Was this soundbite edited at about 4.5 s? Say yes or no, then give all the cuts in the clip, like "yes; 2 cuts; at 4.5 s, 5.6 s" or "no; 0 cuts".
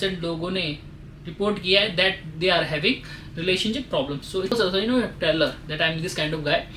yes; 1 cut; at 4.5 s